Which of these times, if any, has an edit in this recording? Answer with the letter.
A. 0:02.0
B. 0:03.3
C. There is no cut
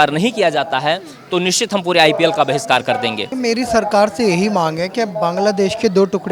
B